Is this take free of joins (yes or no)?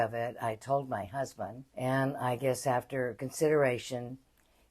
no